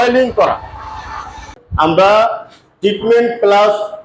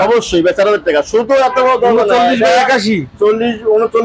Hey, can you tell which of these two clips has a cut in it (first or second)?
first